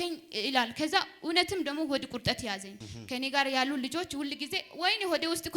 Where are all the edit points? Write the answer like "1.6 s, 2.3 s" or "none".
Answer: 2.8 s

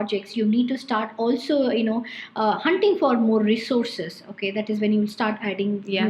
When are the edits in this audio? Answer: none

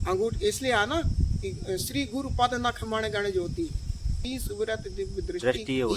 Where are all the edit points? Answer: 4.2 s

